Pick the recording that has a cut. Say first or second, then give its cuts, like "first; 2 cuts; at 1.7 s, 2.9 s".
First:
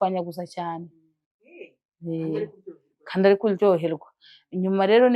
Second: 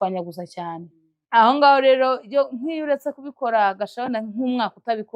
first; 1 cut; at 1.1 s